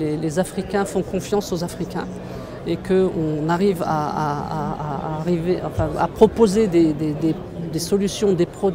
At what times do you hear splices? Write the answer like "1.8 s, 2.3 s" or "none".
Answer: none